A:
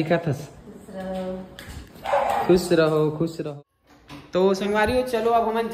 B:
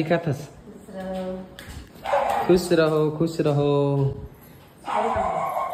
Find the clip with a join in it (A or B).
A